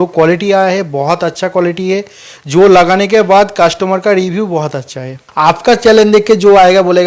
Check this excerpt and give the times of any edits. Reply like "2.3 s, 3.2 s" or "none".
5.2 s